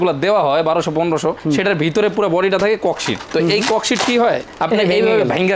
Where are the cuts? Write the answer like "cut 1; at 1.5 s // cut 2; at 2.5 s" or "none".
none